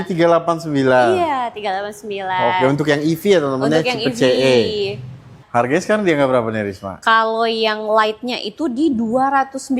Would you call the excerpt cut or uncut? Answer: cut